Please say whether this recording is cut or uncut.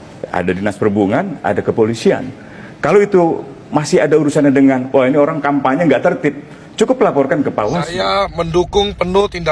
cut